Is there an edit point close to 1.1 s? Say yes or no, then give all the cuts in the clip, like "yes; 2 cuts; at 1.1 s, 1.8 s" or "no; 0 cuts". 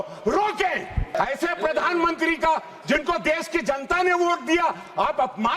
yes; 1 cut; at 1.1 s